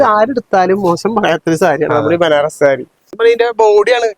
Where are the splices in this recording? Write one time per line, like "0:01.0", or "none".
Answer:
0:03.0